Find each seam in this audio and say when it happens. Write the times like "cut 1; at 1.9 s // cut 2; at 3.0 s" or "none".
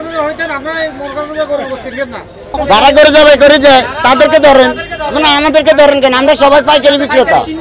cut 1; at 2.5 s